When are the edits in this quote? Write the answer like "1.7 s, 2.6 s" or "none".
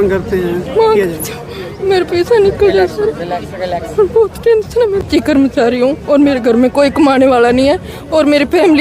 5.1 s

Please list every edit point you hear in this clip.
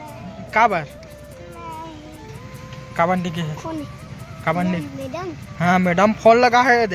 2.3 s

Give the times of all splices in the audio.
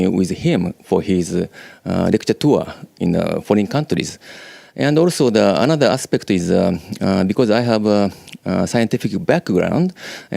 7.0 s

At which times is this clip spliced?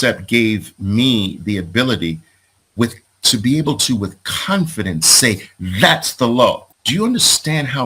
6.7 s

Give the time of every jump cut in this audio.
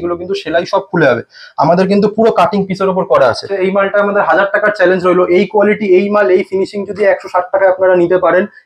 3.5 s

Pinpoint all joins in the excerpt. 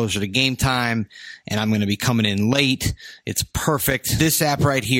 4.1 s

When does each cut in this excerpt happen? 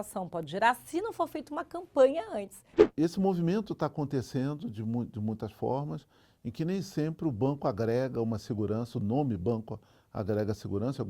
2.9 s

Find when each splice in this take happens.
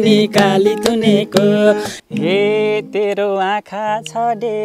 1.9 s

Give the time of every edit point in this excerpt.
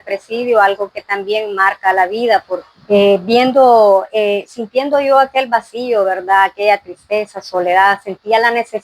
2.7 s

